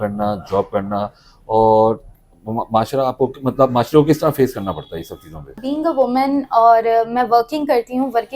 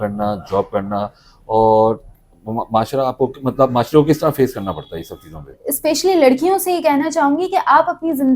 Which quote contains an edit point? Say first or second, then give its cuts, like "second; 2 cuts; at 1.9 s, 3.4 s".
second; 1 cut; at 5.6 s